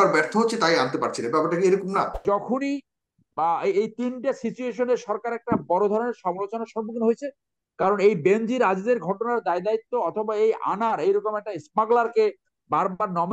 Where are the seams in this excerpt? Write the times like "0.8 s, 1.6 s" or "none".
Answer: 2.2 s